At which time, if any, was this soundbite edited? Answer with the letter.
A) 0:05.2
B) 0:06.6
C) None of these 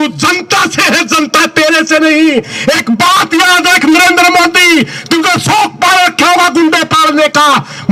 C